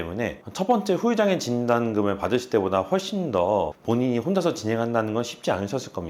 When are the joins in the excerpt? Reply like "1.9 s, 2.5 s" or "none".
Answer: 3.8 s